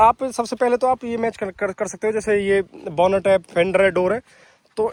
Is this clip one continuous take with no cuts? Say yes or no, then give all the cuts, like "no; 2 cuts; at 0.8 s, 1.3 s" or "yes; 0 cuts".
yes; 0 cuts